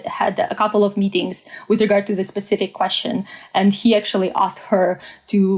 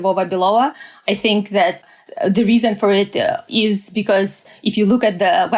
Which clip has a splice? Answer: second; 2 cuts; at 1.8 s, 3.4 s

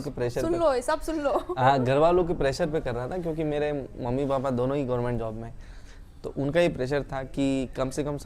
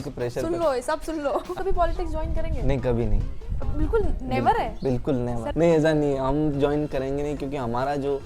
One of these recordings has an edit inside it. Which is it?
second; 2 cuts; at 1.5 s, 5.4 s

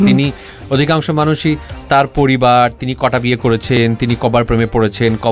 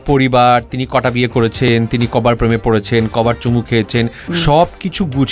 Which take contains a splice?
second; 1 cut; at 4.3 s

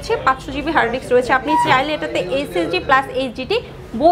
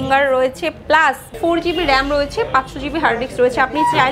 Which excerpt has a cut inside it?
second; 1 cut; at 1.3 s

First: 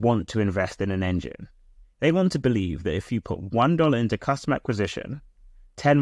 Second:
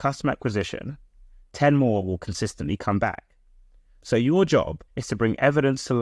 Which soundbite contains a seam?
second; 1 cut; at 4.8 s

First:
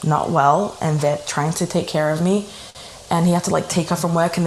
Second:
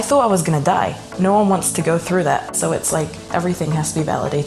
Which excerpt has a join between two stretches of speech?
second; 2 cuts; at 1.1 s, 3.2 s

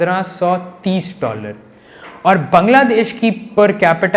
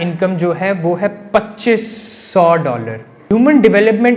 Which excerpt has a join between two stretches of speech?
second; 1 cut; at 3.2 s

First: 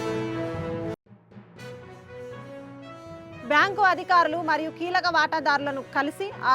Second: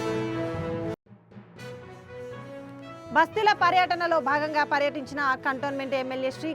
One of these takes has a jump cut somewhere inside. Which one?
second; 1 cut; at 2.4 s

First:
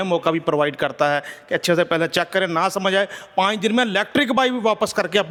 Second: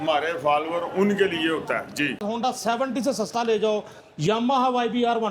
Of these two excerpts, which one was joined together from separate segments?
second; 1 cut; at 2.2 s

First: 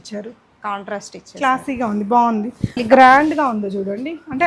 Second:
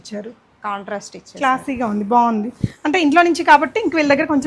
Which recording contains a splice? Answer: first; 1 cut; at 2.8 s

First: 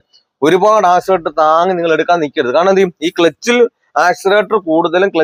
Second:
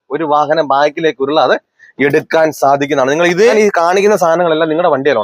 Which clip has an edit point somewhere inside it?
second; 1 cut; at 3.5 s

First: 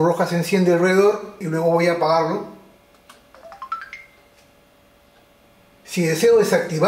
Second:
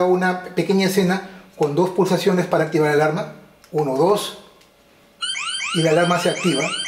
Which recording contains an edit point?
first; 1 cut; at 1.4 s

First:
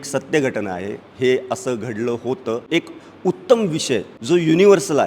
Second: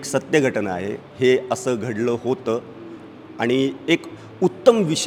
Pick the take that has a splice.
first; 2 cuts; at 2.6 s, 4.1 s

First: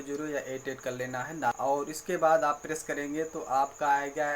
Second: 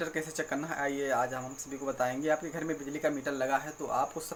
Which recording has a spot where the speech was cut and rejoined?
first; 1 cut; at 1.5 s

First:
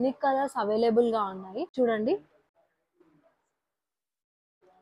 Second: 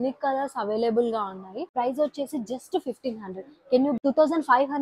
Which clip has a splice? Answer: second; 2 cuts; at 1.7 s, 4.0 s

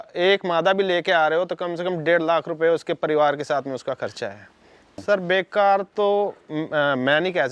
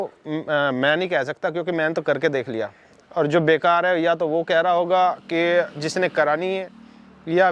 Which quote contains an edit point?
first; 1 cut; at 5.0 s

